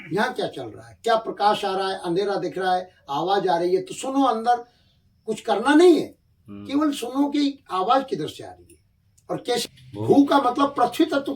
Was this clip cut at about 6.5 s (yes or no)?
no